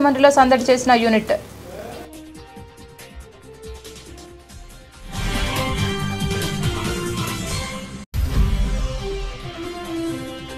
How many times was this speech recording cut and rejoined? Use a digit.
2